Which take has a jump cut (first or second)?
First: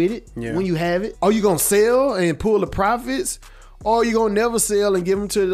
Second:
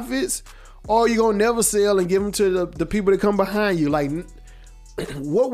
first